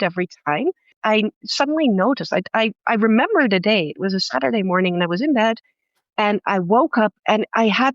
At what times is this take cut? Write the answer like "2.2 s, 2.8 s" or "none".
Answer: 0.9 s